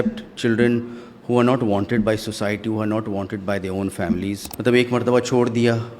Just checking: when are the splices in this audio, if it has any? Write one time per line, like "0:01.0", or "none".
0:04.5